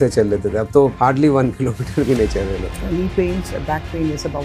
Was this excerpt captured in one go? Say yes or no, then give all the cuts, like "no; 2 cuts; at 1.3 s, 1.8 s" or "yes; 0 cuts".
no; 2 cuts; at 0.9 s, 2.7 s